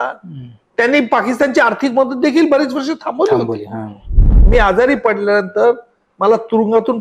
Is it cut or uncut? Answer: cut